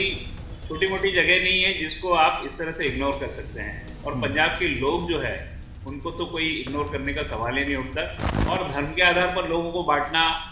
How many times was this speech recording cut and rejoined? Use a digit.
1